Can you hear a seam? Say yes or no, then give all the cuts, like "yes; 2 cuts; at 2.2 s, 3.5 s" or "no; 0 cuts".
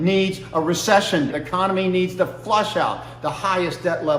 yes; 1 cut; at 1.3 s